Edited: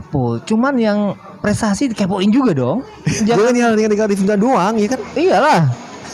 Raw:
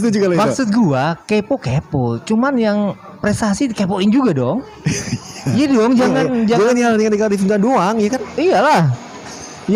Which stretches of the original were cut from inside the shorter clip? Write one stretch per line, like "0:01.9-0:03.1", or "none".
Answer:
0:05.0-0:06.4